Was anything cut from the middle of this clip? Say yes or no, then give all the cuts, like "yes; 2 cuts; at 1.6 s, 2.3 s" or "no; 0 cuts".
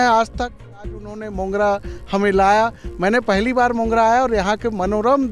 yes; 1 cut; at 0.9 s